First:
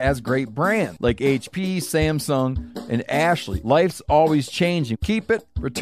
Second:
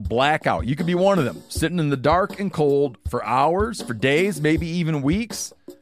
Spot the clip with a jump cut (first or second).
first